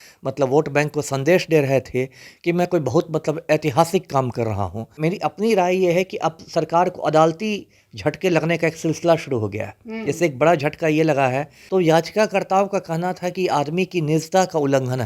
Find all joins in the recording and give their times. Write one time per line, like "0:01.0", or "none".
0:04.8
0:11.5